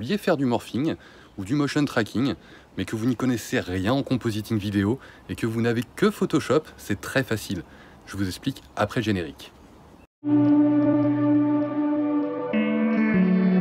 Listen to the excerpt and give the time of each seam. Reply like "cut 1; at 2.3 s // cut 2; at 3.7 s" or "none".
cut 1; at 10.3 s